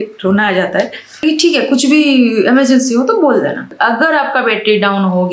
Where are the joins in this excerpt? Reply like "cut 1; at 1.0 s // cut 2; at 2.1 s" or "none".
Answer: cut 1; at 1.2 s // cut 2; at 3.7 s